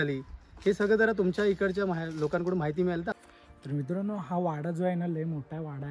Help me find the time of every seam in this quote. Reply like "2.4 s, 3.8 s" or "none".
3.1 s